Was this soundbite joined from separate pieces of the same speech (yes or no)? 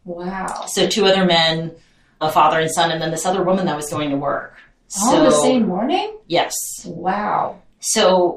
yes